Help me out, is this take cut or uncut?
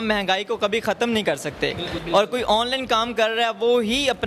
cut